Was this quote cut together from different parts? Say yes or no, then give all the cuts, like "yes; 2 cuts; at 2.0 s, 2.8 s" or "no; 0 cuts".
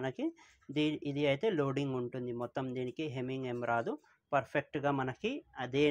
no; 0 cuts